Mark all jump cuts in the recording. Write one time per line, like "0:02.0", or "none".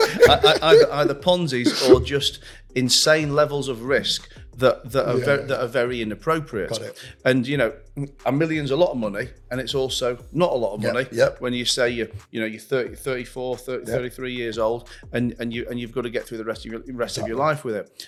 none